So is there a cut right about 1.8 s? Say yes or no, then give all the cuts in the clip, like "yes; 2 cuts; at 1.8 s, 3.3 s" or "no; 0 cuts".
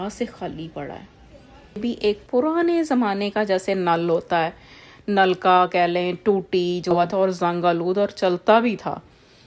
yes; 2 cuts; at 1.8 s, 7.0 s